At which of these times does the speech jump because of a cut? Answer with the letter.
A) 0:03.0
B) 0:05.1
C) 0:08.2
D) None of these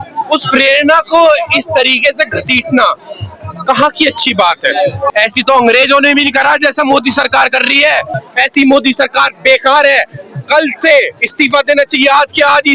B